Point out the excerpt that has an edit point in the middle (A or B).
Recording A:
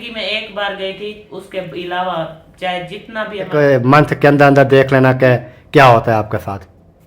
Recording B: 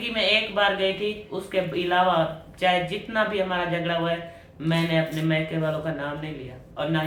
A